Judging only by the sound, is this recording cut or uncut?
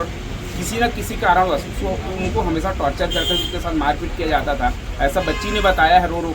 uncut